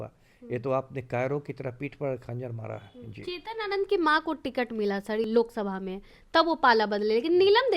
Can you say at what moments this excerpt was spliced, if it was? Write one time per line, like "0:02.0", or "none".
0:05.3